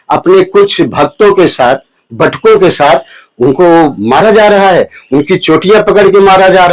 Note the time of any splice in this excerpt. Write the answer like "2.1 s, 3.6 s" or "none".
none